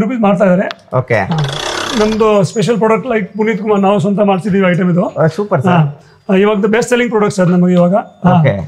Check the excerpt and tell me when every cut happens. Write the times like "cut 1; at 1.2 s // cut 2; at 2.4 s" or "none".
cut 1; at 1.9 s

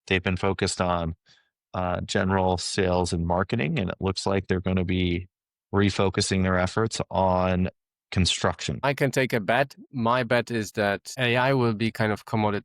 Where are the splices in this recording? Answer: cut 1; at 8.8 s // cut 2; at 9.8 s // cut 3; at 11.1 s

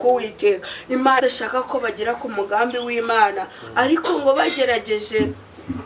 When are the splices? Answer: cut 1; at 1.2 s

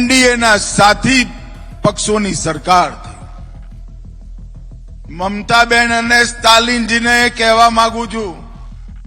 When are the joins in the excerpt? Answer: cut 1; at 3.3 s // cut 2; at 5.1 s

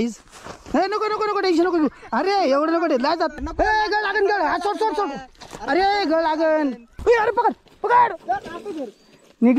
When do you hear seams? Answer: cut 1; at 3.3 s // cut 2; at 6.9 s

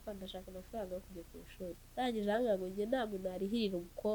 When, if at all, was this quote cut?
cut 1; at 1.7 s

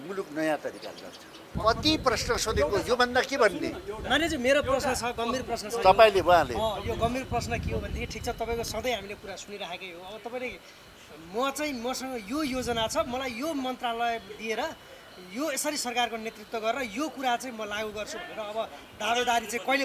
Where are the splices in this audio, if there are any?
cut 1; at 1.5 s

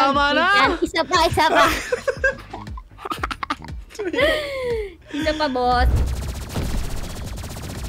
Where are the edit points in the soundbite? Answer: cut 1; at 6.0 s

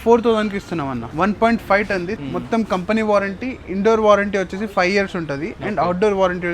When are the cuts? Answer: cut 1; at 1.0 s // cut 2; at 2.2 s

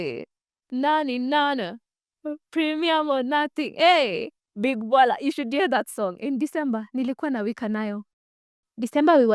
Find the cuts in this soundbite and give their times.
cut 1; at 8.2 s

